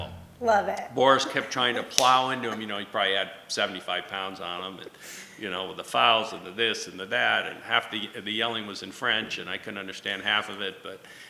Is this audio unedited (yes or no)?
yes